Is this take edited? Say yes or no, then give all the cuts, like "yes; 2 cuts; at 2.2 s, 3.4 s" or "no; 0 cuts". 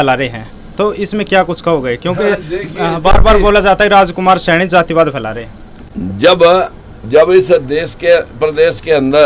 no; 0 cuts